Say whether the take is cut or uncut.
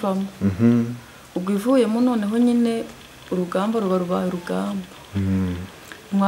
uncut